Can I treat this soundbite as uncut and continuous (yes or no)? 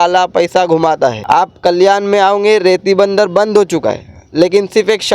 no